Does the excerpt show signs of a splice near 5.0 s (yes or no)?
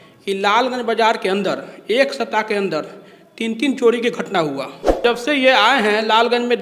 yes